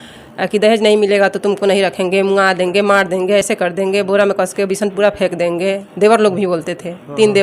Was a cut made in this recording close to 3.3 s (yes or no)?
no